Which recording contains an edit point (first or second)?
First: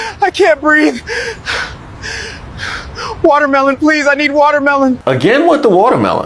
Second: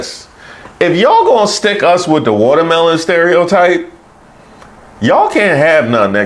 first